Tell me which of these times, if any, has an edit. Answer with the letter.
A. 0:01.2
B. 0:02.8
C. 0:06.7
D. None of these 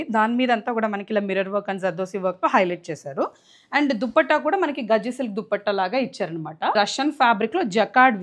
C